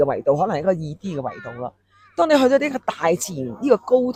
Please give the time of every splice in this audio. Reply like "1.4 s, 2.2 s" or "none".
none